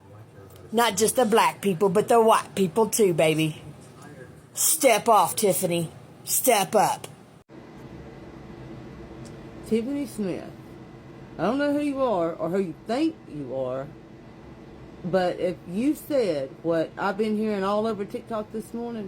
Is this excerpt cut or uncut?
cut